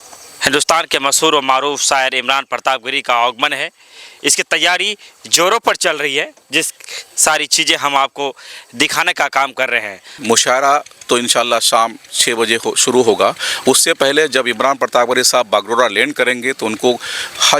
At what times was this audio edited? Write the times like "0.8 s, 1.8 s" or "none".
10.1 s